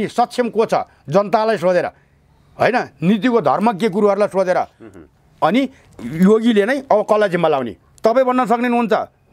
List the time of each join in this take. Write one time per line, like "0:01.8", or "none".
0:06.0